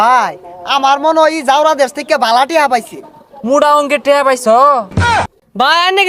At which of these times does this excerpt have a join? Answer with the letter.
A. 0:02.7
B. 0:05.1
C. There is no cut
B